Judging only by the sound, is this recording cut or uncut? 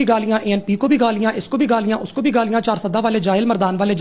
uncut